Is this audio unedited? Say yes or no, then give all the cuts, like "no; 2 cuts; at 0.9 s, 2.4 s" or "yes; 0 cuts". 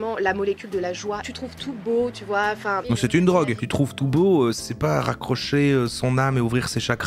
no; 3 cuts; at 1.3 s, 2.8 s, 4.7 s